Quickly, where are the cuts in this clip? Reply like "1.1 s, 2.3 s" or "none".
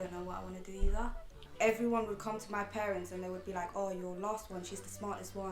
1.4 s